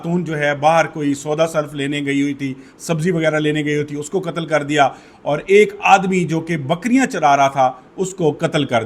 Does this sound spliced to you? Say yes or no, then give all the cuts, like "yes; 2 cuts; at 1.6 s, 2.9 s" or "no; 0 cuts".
no; 0 cuts